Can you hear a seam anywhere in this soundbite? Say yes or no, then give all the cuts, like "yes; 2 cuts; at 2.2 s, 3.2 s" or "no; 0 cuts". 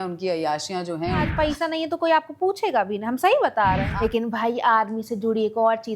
yes; 2 cuts; at 1.3 s, 3.9 s